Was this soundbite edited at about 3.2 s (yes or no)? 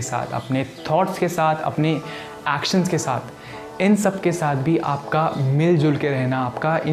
no